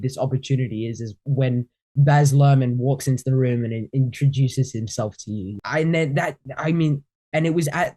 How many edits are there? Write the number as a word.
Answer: one